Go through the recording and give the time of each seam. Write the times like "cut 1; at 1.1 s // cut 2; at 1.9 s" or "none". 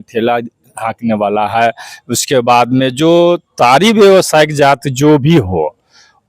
none